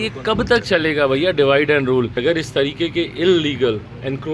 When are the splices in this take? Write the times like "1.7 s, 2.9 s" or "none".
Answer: 2.1 s